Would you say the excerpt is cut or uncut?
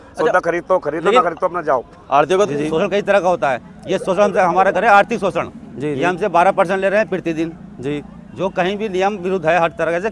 cut